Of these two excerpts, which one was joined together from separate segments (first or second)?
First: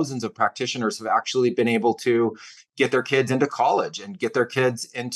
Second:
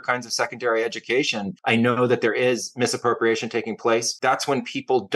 second